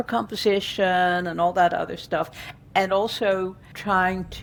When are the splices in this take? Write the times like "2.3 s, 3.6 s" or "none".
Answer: none